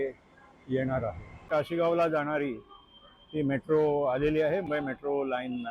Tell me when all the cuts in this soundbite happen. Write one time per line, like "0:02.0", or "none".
0:01.5
0:04.6